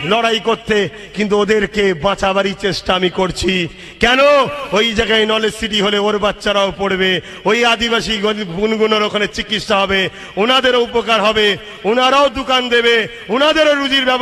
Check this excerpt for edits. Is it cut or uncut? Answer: uncut